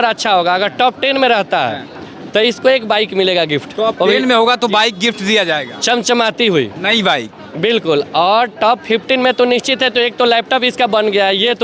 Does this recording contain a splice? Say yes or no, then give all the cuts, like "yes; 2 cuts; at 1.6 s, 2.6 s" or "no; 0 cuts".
no; 0 cuts